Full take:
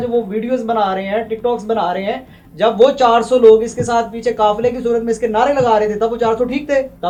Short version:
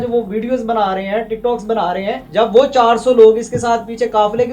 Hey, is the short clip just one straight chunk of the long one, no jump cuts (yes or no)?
no